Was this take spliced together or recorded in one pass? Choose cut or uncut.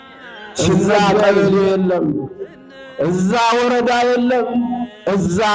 cut